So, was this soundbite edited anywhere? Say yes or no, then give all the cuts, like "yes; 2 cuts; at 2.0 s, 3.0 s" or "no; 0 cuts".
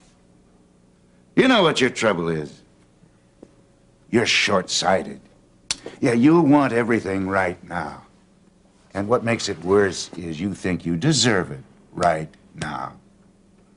no; 0 cuts